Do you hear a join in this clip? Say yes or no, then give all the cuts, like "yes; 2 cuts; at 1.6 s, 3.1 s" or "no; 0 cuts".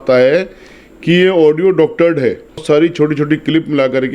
yes; 1 cut; at 2.6 s